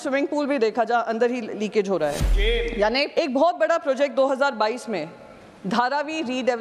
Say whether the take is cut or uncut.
cut